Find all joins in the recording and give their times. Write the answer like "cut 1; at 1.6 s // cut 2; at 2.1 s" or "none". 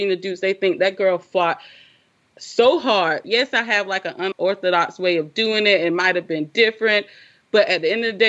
cut 1; at 3.2 s